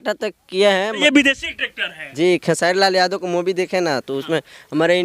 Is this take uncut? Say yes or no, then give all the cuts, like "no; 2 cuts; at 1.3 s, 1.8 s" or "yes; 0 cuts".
no; 1 cut; at 1.0 s